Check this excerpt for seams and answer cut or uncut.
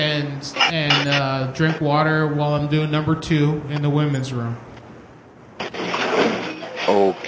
uncut